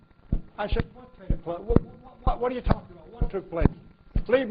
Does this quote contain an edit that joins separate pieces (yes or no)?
no